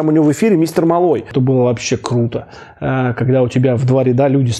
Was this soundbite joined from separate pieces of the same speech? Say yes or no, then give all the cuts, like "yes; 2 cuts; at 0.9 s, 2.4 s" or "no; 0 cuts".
yes; 1 cut; at 1.3 s